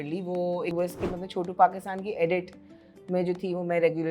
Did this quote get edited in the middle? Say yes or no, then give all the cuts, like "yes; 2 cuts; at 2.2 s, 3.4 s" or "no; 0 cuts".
no; 0 cuts